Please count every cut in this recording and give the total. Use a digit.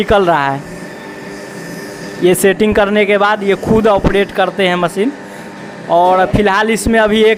0